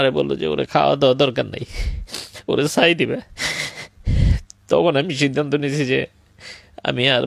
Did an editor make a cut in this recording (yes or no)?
no